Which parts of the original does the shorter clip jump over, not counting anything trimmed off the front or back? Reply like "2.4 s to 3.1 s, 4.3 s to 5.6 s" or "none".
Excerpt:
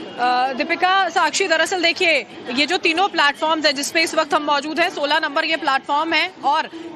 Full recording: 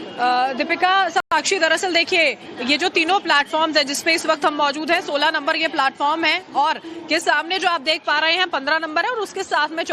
1.2 s to 1.3 s